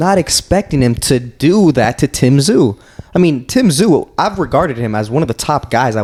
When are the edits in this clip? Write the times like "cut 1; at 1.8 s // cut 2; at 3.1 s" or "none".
none